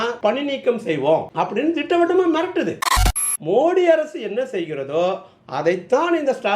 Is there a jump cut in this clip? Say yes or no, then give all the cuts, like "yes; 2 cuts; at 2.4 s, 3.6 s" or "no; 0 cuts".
yes; 1 cut; at 2.8 s